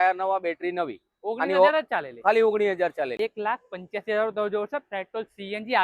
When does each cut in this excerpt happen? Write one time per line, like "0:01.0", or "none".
0:03.1